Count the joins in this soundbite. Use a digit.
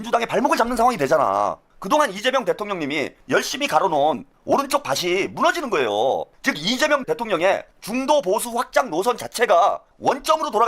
3